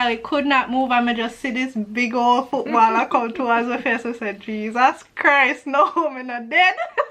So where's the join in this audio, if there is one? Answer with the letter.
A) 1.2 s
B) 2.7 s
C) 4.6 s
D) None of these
D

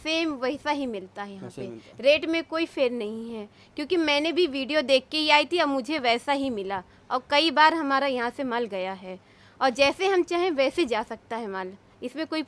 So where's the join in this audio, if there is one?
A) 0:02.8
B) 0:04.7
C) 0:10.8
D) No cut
D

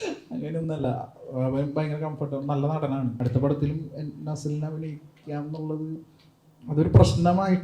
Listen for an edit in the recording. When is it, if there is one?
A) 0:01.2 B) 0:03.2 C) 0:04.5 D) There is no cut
B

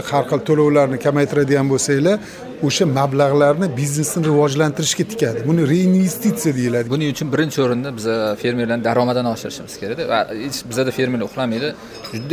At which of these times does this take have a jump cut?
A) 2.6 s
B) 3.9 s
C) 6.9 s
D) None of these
C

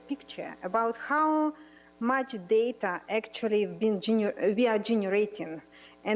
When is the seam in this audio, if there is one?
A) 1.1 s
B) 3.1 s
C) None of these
A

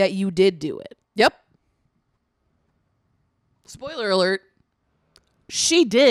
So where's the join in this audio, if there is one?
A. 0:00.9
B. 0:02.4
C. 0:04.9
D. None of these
D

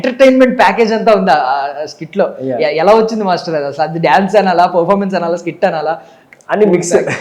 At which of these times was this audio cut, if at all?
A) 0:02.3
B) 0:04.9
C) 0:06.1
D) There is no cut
D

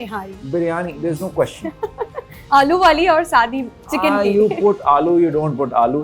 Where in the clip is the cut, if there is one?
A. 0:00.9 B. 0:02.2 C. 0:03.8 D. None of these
D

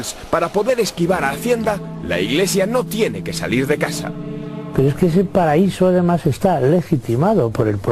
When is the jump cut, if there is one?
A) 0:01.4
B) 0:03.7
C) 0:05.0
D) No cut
D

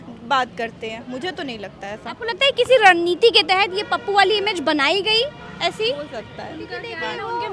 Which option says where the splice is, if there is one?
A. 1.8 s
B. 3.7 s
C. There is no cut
C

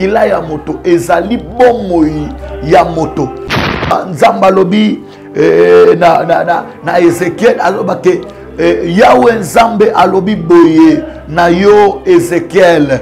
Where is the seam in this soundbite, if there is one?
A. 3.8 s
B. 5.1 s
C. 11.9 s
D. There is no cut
A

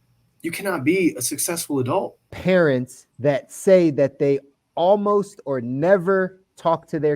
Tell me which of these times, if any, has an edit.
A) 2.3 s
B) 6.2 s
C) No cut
A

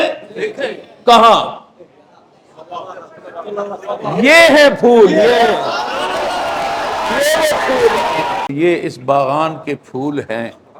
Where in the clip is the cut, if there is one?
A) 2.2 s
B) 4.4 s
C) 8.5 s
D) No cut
C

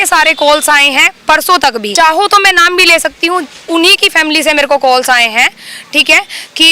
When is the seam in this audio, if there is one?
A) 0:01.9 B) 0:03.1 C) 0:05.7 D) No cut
A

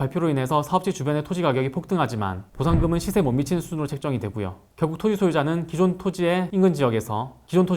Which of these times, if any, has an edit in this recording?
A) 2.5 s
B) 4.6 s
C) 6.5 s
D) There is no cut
B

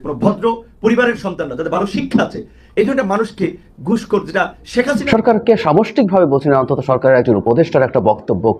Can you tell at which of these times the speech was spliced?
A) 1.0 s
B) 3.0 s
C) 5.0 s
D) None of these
C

